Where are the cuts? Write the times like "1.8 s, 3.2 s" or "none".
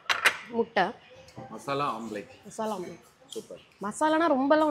none